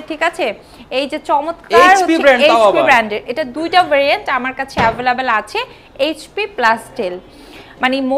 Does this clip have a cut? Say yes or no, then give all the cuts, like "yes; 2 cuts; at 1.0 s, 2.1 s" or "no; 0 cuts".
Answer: no; 0 cuts